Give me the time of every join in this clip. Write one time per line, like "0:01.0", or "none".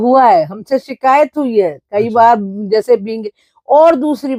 none